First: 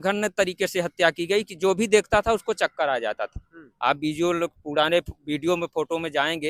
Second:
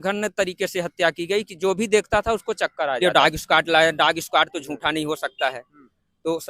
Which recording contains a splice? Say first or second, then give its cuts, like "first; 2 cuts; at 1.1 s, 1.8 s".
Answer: second; 1 cut; at 3.0 s